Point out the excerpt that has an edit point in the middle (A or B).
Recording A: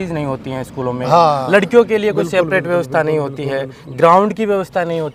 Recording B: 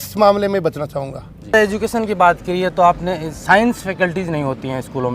B